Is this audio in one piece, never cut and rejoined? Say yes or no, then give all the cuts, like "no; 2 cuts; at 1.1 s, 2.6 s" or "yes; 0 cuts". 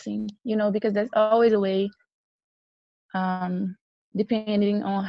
yes; 0 cuts